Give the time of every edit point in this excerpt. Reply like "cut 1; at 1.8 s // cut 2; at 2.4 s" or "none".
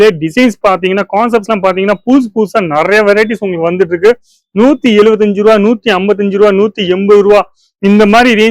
none